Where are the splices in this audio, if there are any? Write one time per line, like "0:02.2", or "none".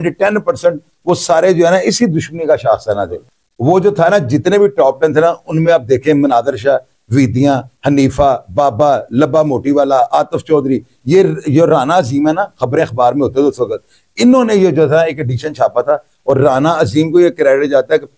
none